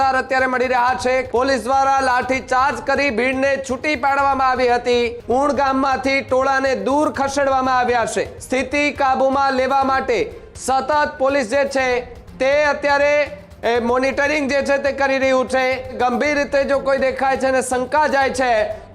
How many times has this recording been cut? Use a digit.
4